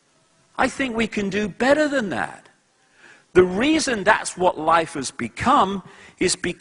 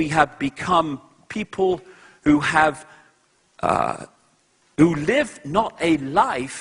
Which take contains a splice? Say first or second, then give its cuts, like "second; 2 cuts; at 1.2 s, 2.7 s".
second; 1 cut; at 5.5 s